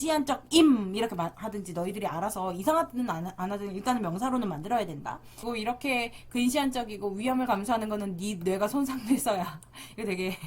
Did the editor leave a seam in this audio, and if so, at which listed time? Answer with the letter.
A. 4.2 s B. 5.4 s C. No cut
B